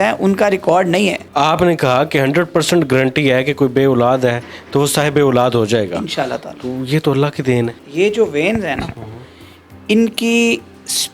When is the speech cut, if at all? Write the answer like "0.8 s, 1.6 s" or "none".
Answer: 1.2 s, 7.8 s